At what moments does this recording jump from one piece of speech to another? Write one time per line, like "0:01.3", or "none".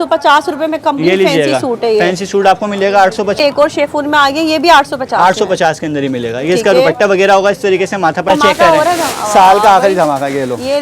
0:03.4
0:08.3